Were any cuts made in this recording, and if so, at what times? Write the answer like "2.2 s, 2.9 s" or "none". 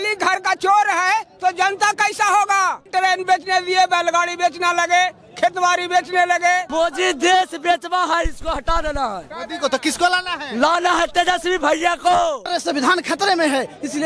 2.8 s, 6.7 s, 12.5 s

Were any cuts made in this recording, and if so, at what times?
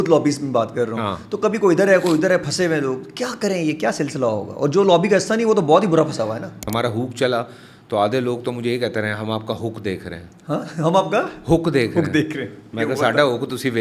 6.7 s

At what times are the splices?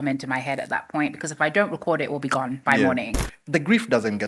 3.2 s

